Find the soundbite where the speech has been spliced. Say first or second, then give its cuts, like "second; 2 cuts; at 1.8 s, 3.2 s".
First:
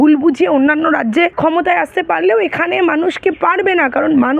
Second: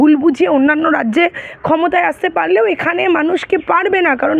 first; 1 cut; at 1.3 s